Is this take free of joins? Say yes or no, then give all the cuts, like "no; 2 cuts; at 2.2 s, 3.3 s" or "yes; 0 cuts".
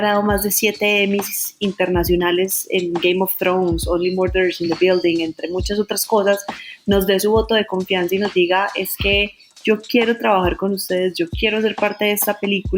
yes; 0 cuts